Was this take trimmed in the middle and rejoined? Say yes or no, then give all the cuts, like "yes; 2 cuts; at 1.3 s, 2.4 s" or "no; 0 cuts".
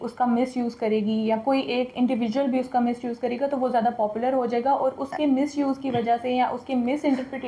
no; 0 cuts